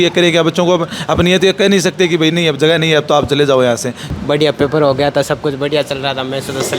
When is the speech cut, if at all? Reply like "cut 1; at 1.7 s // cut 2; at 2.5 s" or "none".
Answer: cut 1; at 4.0 s